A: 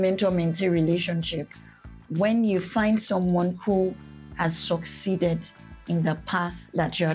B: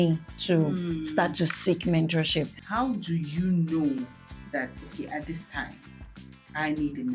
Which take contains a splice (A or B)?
B